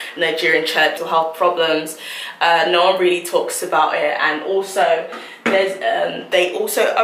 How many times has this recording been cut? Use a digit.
1